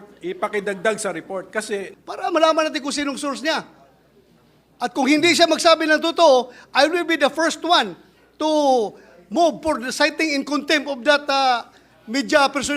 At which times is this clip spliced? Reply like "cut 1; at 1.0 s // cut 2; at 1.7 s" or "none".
cut 1; at 1.9 s